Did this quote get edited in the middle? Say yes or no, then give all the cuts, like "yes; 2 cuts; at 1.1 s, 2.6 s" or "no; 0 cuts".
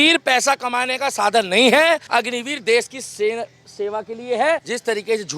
yes; 2 cuts; at 2.0 s, 4.6 s